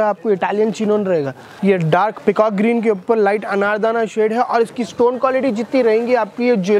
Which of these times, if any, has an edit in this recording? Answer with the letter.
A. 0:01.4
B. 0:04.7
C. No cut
A